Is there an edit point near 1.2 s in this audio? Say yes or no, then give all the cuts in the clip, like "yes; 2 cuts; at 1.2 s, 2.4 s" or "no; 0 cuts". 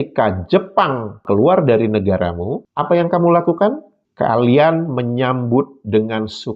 yes; 1 cut; at 1.2 s